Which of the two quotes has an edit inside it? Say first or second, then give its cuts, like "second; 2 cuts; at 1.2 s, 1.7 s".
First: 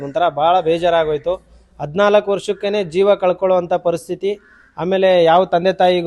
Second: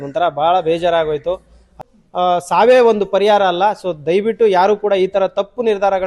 second; 1 cut; at 1.8 s